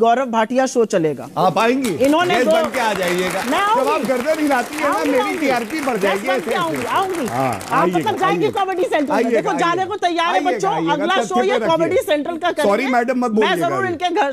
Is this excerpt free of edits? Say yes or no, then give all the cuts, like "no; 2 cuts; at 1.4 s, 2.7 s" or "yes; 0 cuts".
yes; 0 cuts